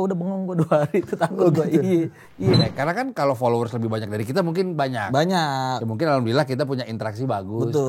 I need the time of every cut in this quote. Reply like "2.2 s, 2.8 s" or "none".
2.6 s